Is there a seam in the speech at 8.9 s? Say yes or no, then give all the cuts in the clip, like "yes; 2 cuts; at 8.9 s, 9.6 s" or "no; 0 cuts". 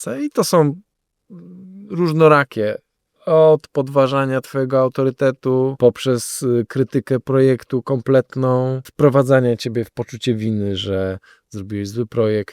yes; 2 cuts; at 5.7 s, 8.9 s